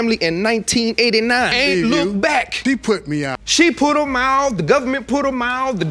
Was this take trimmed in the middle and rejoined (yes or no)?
no